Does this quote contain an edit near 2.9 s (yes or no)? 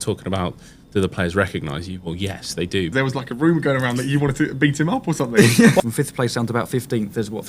yes